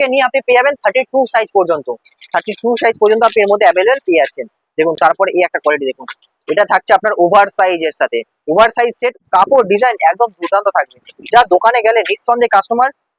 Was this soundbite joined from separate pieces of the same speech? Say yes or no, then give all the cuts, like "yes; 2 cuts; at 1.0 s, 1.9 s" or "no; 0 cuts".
yes; 1 cut; at 9.1 s